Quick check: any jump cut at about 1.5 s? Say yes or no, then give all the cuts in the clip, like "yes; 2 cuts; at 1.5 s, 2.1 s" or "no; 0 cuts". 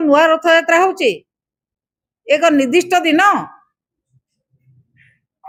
no; 0 cuts